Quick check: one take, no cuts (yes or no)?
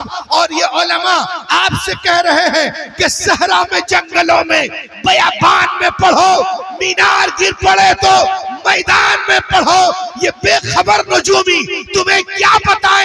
yes